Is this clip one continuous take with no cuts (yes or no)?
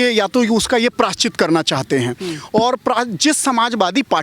yes